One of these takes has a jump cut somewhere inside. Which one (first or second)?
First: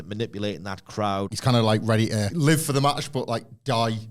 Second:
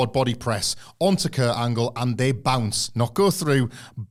first